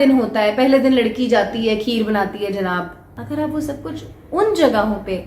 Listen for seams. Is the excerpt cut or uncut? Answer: cut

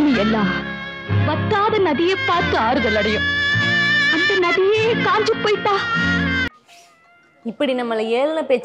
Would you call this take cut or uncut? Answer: uncut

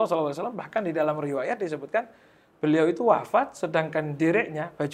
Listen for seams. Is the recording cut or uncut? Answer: uncut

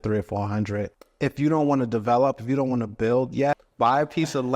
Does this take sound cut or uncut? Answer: cut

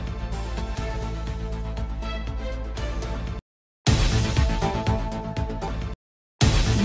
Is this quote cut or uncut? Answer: cut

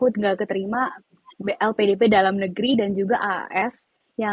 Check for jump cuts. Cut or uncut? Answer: uncut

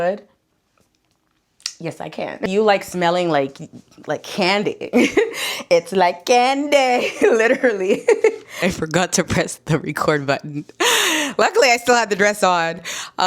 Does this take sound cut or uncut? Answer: cut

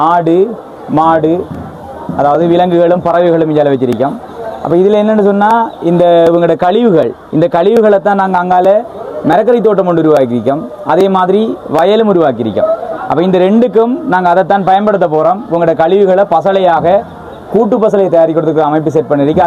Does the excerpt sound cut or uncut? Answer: uncut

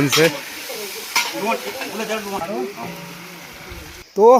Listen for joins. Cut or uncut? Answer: uncut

